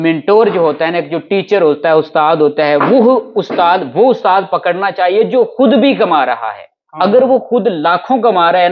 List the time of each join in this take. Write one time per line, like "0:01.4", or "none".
none